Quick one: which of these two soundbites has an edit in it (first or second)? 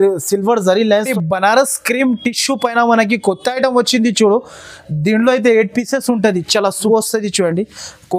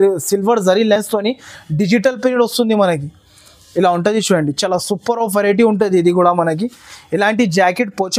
first